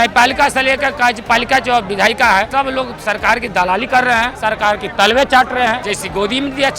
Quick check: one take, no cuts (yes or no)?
no